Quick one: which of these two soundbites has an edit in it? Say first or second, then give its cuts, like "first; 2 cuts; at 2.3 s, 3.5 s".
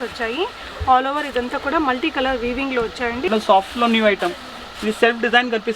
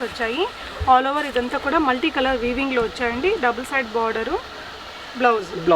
first; 1 cut; at 3.3 s